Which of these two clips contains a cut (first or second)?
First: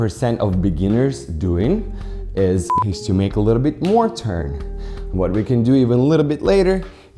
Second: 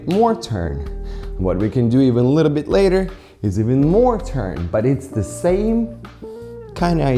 first